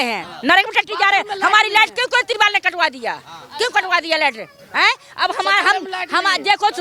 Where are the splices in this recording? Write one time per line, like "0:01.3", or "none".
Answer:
none

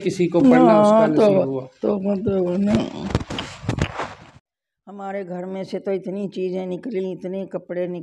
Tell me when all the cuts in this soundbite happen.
0:04.2

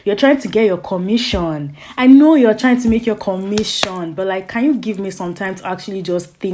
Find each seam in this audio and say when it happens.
none

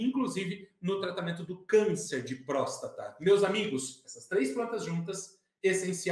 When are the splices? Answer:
none

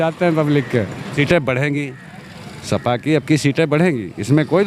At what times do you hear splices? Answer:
0:01.1

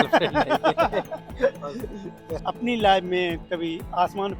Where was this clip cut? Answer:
0:02.4

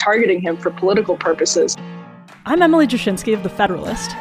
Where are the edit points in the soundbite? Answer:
none

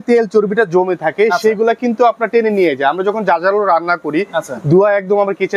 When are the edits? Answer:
none

